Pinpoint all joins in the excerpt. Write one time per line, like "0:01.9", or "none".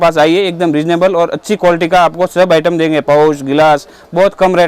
none